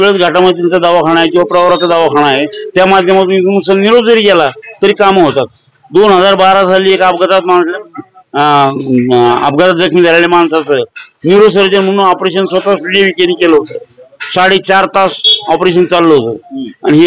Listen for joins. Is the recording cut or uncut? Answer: uncut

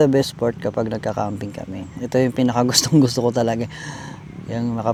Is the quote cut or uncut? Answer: uncut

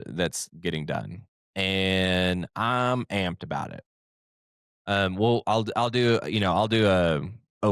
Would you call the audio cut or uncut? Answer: uncut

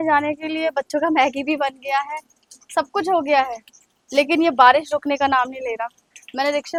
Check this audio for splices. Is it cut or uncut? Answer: uncut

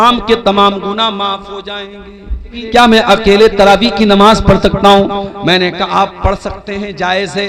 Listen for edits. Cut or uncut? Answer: cut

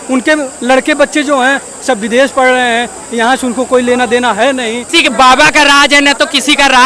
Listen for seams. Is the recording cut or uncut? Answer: cut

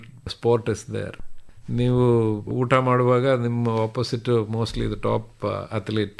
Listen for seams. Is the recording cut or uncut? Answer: uncut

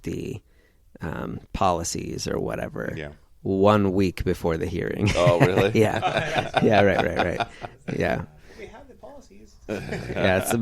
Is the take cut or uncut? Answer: uncut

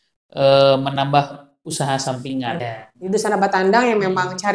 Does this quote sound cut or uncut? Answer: cut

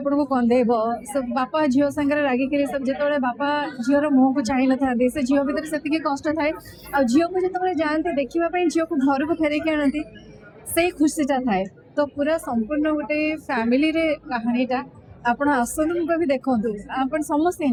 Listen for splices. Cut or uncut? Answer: uncut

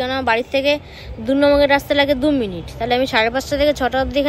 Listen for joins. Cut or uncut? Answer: uncut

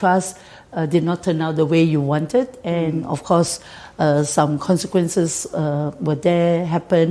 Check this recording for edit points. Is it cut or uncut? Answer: uncut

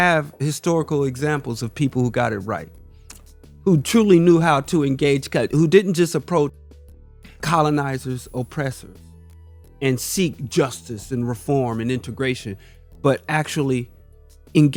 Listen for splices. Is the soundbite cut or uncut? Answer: uncut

